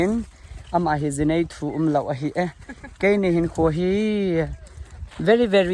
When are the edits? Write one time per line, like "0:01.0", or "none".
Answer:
none